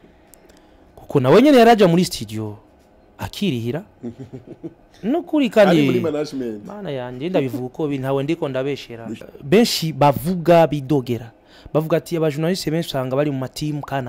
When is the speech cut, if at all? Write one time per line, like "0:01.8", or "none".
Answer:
0:09.2